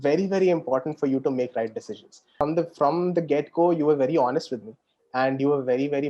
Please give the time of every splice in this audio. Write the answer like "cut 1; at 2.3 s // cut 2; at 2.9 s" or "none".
cut 1; at 2.4 s